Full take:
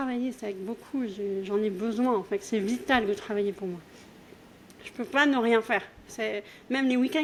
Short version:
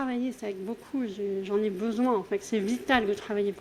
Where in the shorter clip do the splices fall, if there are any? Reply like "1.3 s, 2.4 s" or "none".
none